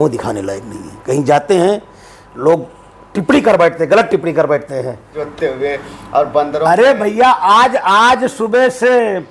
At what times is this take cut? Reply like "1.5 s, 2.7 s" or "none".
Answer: 5.2 s

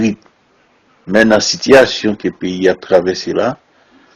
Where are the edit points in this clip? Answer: 1.2 s

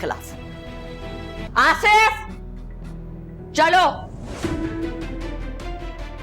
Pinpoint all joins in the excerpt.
1.5 s

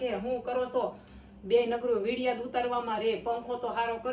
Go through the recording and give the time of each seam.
none

